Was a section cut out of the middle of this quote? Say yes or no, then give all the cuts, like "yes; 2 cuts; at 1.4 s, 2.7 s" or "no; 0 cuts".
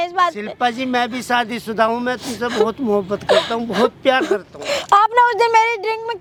no; 0 cuts